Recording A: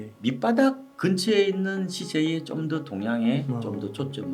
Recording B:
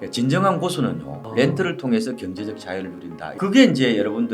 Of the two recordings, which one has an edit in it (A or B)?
B